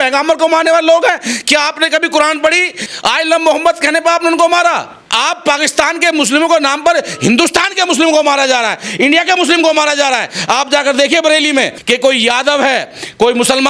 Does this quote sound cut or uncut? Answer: cut